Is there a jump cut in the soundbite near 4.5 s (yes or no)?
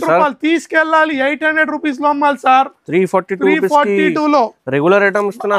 no